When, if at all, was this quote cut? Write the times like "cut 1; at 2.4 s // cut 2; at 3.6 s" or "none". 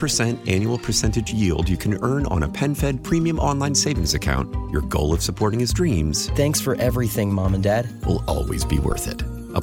none